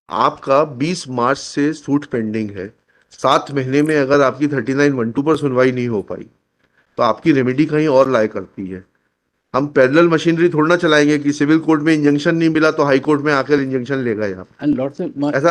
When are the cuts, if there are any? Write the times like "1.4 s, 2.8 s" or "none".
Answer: none